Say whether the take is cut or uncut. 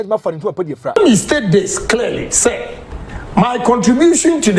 cut